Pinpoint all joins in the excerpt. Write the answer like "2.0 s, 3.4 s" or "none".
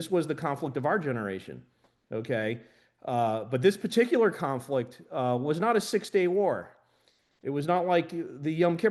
none